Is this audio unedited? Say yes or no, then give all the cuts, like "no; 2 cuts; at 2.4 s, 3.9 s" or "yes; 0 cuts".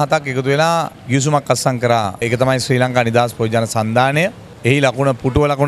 no; 3 cuts; at 1.0 s, 2.2 s, 4.5 s